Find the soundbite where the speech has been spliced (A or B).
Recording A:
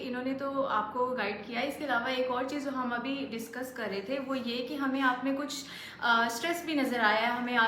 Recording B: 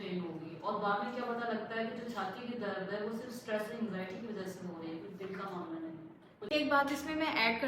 B